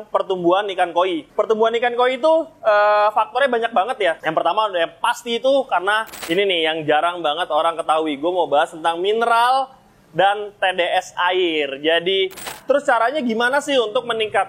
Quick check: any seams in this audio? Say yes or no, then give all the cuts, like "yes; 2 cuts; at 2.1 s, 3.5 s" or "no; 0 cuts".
yes; 4 cuts; at 1.2 s, 4.2 s, 6.1 s, 12.5 s